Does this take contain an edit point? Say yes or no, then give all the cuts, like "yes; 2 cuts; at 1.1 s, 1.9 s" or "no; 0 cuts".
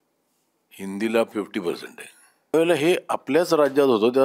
yes; 1 cut; at 2.5 s